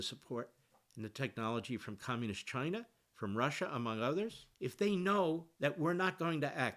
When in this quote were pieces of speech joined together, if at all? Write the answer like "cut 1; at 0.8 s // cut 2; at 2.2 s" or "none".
cut 1; at 4.4 s // cut 2; at 5.5 s